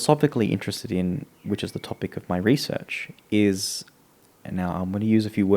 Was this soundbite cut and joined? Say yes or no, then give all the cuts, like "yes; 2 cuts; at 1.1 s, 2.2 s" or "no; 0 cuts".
no; 0 cuts